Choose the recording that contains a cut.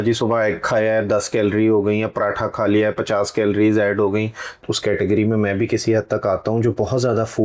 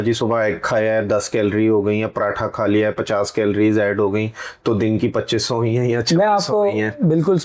first; 1 cut; at 4.6 s

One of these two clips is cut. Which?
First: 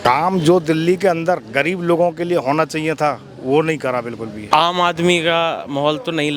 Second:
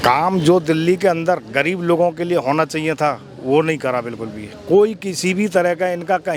first; 1 cut; at 4.4 s

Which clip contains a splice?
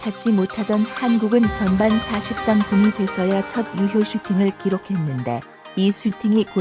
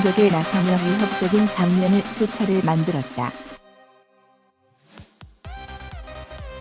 second; 1 cut; at 3.3 s

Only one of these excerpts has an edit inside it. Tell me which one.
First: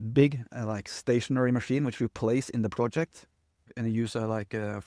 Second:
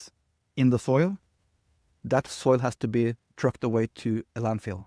first; 1 cut; at 3.6 s

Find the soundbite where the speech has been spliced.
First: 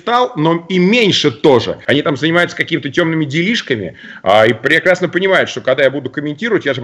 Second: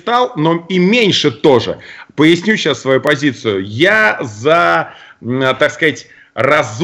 first; 1 cut; at 1.8 s

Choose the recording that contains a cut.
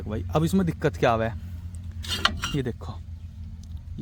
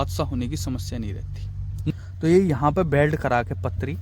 second; 1 cut; at 1.9 s

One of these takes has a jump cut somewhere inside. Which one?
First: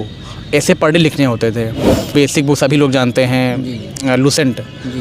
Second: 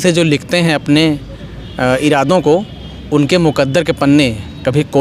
first; 1 cut; at 2.1 s

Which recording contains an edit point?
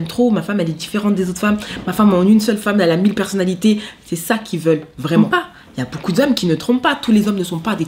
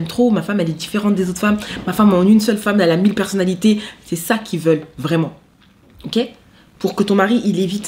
first; 1 cut; at 5.2 s

